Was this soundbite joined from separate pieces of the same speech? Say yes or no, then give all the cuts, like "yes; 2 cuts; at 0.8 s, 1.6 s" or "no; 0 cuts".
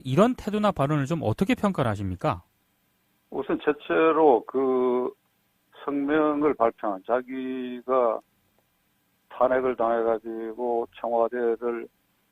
no; 0 cuts